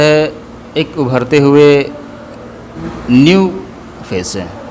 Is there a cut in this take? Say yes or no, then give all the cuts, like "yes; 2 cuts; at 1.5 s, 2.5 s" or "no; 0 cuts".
yes; 1 cut; at 2.8 s